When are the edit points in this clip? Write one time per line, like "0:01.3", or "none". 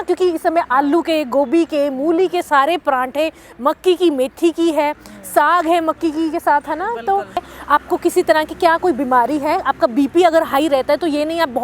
0:07.5